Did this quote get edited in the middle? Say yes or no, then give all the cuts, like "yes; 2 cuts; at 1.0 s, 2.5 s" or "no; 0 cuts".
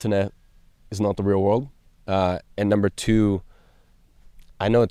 no; 0 cuts